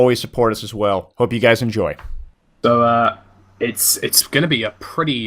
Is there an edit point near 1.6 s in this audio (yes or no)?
yes